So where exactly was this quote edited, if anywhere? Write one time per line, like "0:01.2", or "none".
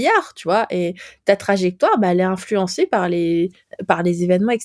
0:03.7